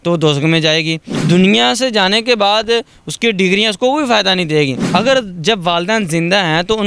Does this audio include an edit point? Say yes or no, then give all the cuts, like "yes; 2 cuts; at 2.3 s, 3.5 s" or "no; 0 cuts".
yes; 2 cuts; at 1.2 s, 4.8 s